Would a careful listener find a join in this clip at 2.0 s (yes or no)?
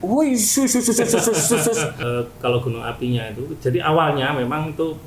yes